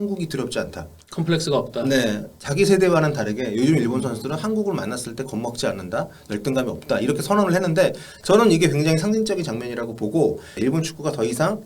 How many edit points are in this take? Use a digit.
1